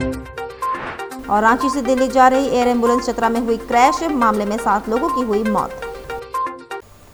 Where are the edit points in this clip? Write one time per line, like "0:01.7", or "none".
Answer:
none